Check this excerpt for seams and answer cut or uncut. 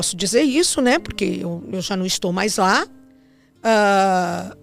uncut